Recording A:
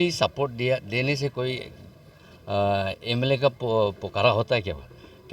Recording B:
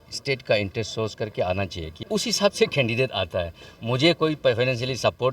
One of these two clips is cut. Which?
B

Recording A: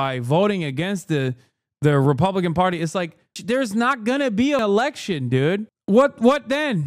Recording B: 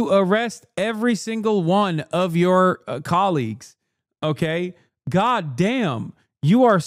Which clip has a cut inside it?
A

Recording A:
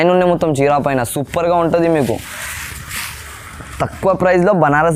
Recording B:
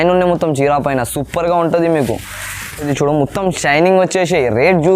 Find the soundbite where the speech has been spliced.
B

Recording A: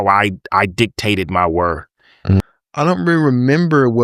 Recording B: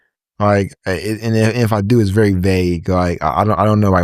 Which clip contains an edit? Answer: A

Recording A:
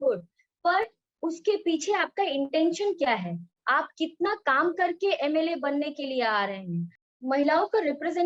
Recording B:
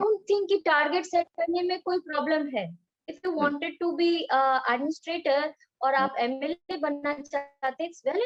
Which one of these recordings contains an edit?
A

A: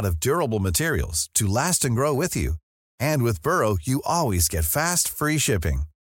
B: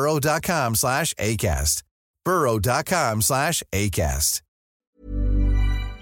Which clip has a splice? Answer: B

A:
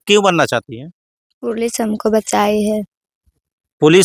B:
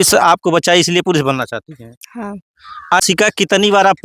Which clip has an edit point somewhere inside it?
B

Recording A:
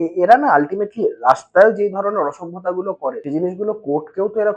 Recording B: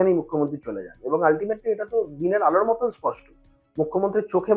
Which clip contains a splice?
A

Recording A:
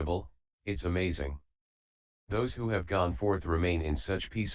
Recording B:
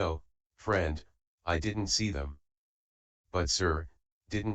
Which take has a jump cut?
B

